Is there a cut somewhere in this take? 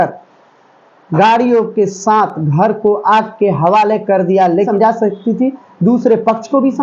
yes; 1 cut; at 4.7 s

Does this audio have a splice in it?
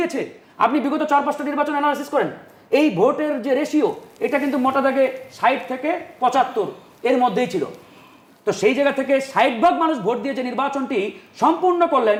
no; 0 cuts

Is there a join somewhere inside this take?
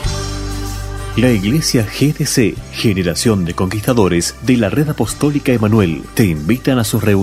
no; 0 cuts

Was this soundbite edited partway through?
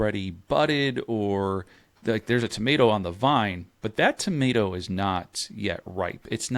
no; 0 cuts

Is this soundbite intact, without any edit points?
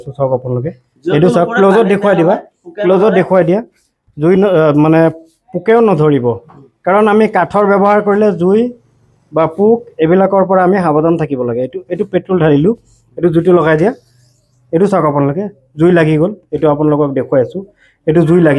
yes; 0 cuts

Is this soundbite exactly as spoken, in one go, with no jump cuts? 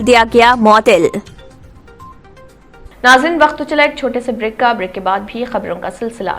no; 1 cut; at 2.9 s

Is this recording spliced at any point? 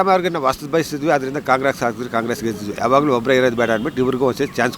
yes; 1 cut; at 2.7 s

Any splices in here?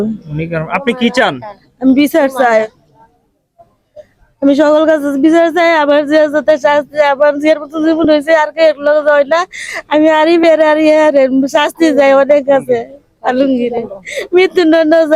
no; 0 cuts

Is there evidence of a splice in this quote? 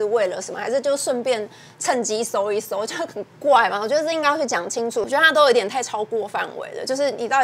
yes; 1 cut; at 5.1 s

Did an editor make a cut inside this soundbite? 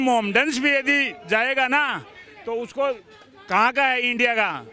no; 0 cuts

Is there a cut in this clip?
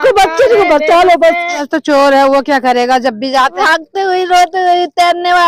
yes; 2 cuts; at 1.7 s, 3.6 s

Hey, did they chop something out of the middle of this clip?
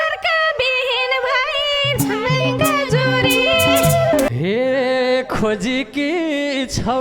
yes; 1 cut; at 4.3 s

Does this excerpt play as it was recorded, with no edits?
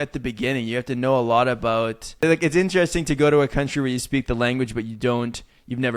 no; 1 cut; at 2.1 s

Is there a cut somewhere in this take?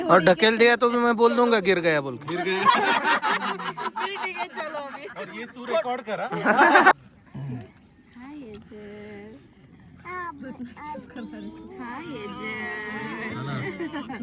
no; 0 cuts

